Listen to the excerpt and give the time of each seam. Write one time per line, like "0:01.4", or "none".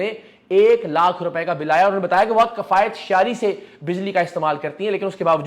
none